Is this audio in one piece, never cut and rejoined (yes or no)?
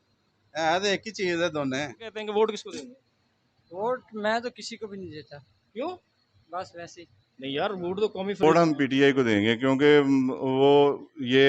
no